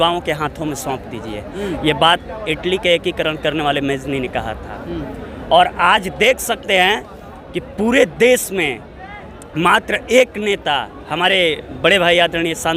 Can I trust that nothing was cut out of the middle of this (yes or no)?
yes